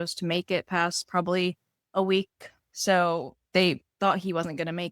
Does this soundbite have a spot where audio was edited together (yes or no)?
yes